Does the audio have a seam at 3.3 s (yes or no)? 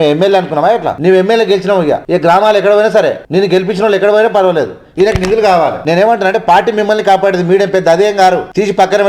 no